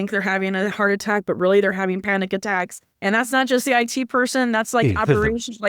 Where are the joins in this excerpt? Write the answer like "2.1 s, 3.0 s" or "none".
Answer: 2.8 s